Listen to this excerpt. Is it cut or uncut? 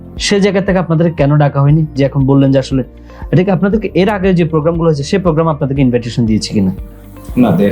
uncut